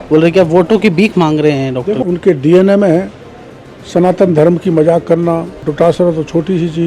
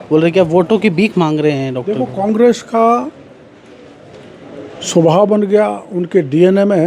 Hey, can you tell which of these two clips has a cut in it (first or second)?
first